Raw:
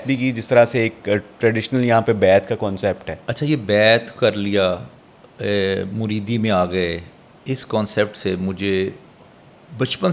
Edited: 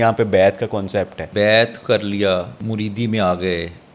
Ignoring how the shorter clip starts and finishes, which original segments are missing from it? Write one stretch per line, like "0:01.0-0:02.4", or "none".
0:03.2-0:03.6
0:04.9-0:05.9